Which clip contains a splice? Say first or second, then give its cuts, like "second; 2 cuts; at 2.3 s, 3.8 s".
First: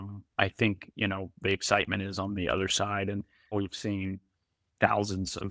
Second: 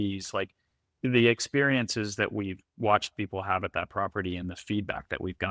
first; 1 cut; at 3.5 s